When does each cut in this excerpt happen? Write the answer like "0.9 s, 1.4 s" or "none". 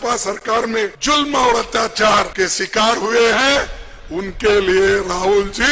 1.0 s, 2.3 s